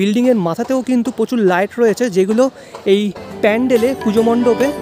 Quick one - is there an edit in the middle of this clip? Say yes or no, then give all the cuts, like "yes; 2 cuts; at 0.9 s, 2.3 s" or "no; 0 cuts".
no; 0 cuts